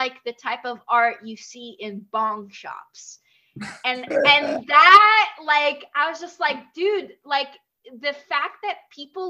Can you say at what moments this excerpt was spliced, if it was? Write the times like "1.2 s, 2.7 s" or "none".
none

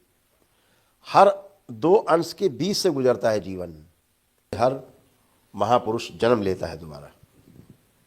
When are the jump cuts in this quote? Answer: 4.6 s

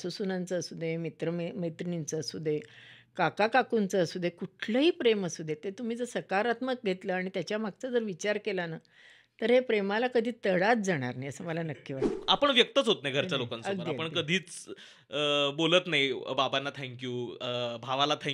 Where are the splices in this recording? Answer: 12.0 s

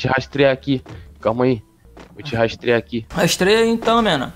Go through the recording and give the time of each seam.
3.1 s

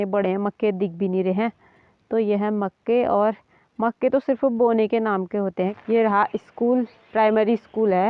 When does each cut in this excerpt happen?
5.8 s

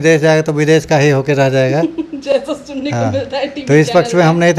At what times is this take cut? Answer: none

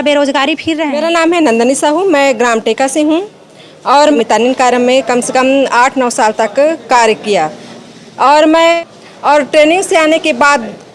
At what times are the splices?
0.9 s, 4.2 s, 8.8 s

